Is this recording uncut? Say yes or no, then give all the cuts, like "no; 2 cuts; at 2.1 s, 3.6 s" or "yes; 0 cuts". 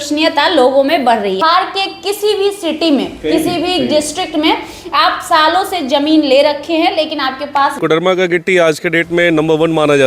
no; 2 cuts; at 1.4 s, 7.7 s